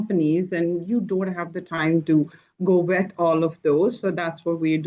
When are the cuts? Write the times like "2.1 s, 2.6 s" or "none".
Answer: none